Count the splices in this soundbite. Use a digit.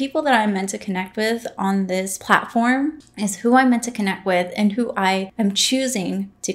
3